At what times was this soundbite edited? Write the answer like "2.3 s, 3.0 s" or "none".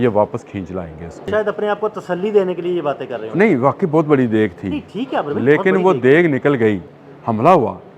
1.3 s, 6.9 s